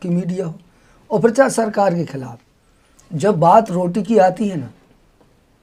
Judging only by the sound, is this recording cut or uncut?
uncut